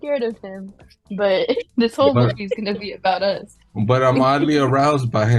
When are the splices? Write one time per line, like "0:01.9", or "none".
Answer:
none